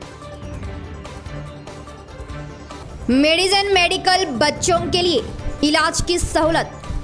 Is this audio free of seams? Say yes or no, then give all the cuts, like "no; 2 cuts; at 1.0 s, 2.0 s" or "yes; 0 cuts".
no; 1 cut; at 1.1 s